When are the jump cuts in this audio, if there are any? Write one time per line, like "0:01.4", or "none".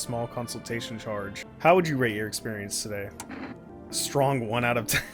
0:01.4
0:03.7